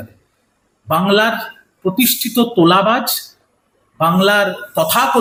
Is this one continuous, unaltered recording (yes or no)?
yes